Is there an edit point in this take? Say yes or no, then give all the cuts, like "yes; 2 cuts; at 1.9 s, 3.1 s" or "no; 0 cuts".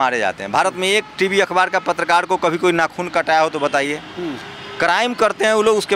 no; 0 cuts